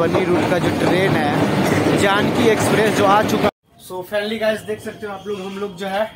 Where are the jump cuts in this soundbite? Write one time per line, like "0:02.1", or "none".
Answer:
0:03.5